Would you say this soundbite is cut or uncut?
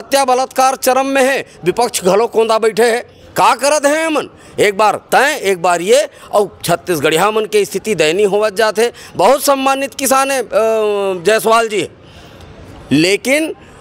uncut